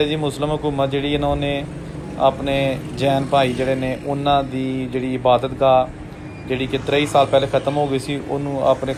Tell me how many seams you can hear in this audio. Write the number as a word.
zero